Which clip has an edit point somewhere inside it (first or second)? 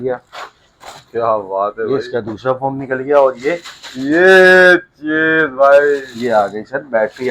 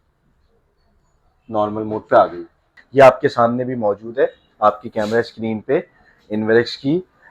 second